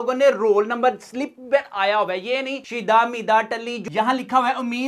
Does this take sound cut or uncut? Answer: cut